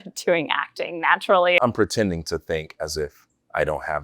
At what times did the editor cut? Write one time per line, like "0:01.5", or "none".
0:01.6